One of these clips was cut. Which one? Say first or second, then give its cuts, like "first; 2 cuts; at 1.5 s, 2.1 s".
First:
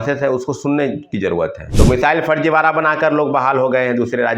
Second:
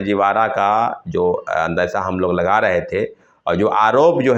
first; 1 cut; at 1.6 s